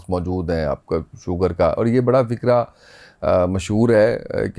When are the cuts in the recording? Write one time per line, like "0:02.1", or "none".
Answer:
none